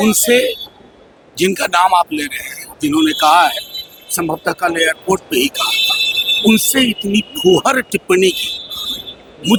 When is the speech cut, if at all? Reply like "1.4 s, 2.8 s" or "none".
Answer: none